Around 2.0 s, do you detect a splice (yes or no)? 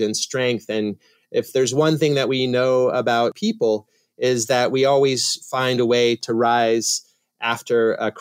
no